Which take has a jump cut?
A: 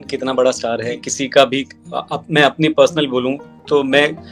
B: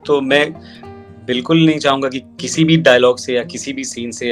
A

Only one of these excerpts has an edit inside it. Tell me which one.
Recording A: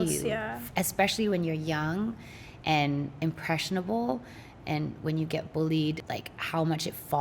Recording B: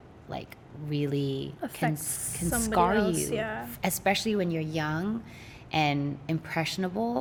A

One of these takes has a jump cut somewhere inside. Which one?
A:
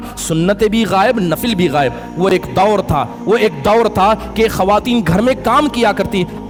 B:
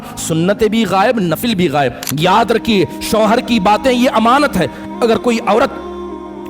B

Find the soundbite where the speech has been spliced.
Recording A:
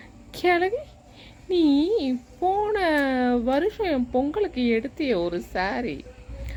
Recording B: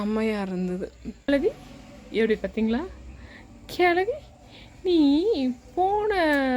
B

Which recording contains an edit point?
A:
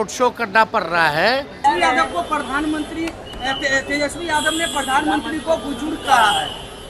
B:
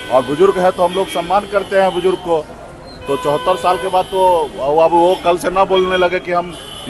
A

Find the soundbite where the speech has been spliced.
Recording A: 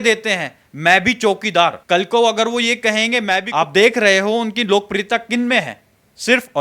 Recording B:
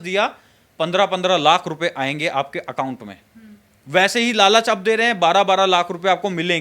A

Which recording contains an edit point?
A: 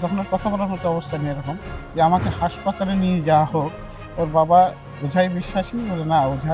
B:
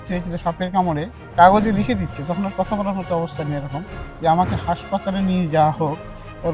B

